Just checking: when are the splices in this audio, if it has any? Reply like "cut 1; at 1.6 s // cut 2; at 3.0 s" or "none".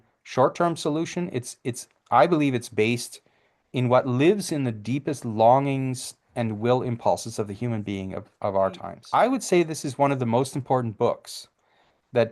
cut 1; at 8.9 s